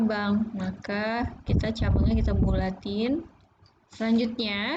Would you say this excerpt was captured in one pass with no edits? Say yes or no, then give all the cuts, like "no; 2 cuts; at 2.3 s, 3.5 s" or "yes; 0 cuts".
no; 1 cut; at 3.9 s